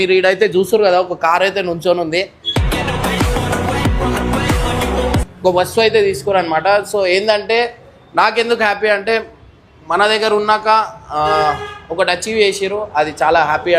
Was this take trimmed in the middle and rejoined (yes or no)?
yes